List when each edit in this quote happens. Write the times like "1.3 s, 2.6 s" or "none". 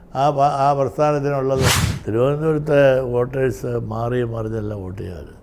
1.8 s